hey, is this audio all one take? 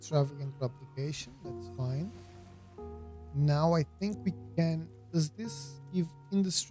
yes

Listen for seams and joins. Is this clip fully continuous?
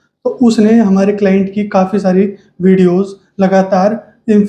yes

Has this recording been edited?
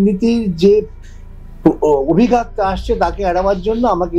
no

